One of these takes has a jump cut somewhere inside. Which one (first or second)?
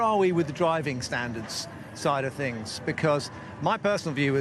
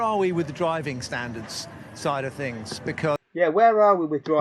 first